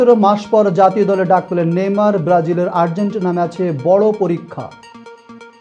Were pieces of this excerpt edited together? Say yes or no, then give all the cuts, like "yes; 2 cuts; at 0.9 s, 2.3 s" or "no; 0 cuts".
no; 0 cuts